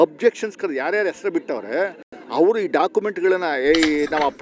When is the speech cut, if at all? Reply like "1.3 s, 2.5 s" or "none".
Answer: none